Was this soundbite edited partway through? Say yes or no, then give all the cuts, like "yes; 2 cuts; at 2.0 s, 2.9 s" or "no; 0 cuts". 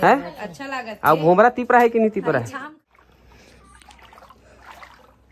yes; 1 cut; at 3.0 s